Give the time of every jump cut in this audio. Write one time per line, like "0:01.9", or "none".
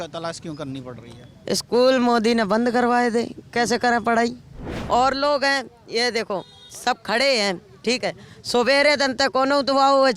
0:04.7